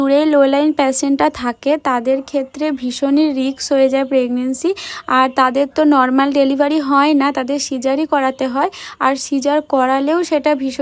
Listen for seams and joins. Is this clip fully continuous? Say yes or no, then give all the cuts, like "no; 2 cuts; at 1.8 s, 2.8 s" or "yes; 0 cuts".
yes; 0 cuts